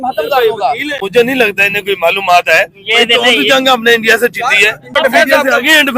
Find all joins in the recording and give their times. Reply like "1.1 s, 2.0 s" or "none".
1.0 s, 4.9 s